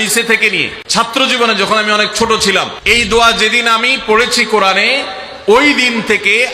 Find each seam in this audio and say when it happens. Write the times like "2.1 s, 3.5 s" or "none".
1.1 s, 2.8 s